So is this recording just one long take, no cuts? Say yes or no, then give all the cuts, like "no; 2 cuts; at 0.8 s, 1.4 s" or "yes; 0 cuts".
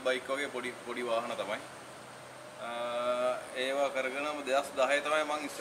yes; 0 cuts